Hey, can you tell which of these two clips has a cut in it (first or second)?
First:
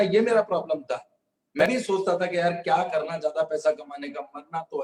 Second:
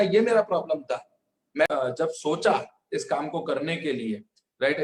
second